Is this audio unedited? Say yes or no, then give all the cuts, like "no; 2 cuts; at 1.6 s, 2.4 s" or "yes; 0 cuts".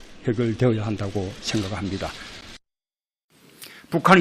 yes; 0 cuts